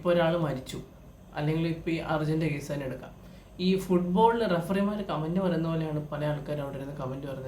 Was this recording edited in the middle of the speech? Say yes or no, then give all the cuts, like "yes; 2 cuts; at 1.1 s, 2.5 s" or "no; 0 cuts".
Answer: no; 0 cuts